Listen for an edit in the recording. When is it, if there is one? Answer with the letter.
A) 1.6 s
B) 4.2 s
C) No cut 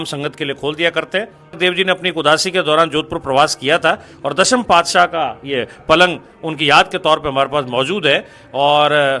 A